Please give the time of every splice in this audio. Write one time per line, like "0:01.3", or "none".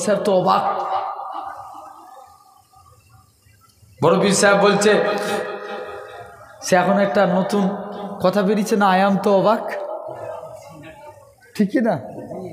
none